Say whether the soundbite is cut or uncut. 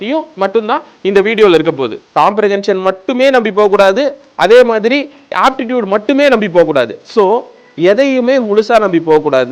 cut